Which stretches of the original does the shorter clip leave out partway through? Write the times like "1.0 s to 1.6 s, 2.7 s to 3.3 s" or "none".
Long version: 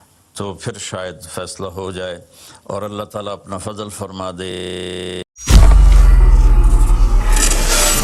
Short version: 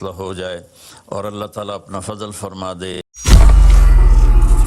4.6 s to 5.2 s